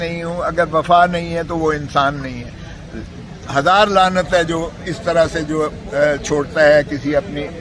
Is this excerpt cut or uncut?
uncut